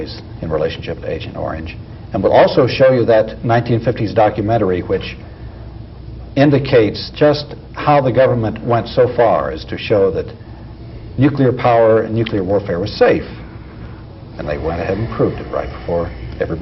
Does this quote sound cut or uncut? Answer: cut